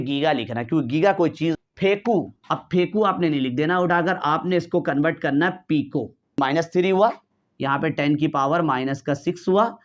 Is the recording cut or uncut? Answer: cut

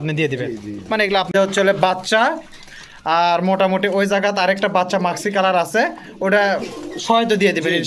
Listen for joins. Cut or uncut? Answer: cut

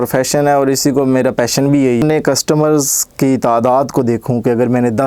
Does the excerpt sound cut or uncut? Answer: cut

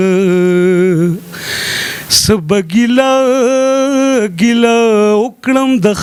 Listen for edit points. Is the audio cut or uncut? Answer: uncut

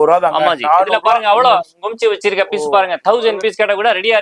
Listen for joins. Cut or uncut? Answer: uncut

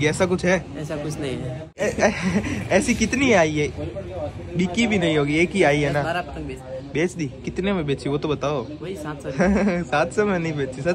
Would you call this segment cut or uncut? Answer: cut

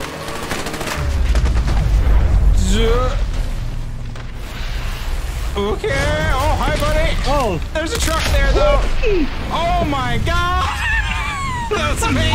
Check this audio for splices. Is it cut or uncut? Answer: uncut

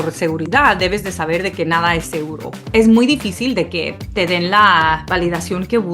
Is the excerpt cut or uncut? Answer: cut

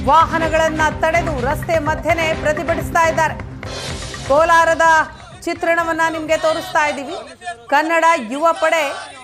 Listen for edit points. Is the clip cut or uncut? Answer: uncut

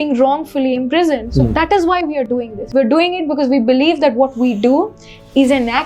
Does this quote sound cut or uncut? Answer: cut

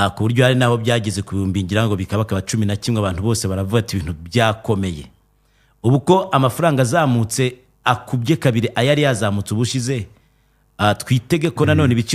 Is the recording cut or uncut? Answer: uncut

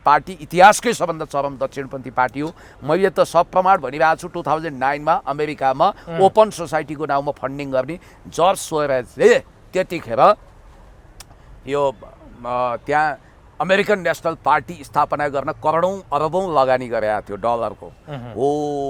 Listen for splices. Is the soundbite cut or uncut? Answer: uncut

